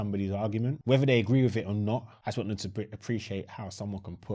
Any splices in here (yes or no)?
yes